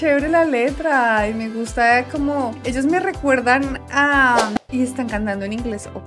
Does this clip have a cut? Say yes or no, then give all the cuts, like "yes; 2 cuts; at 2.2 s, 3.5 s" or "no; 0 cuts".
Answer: yes; 1 cut; at 4.6 s